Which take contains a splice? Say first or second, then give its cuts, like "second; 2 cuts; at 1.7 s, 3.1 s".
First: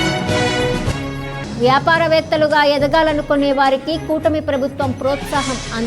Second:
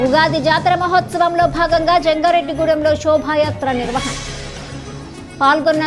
first; 1 cut; at 0.9 s